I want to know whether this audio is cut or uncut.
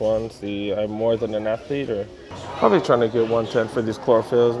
cut